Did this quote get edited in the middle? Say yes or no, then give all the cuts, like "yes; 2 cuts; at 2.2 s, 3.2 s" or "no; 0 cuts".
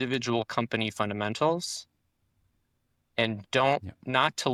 no; 0 cuts